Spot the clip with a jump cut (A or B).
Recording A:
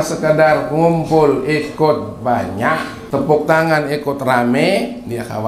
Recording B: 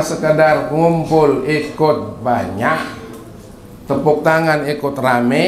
A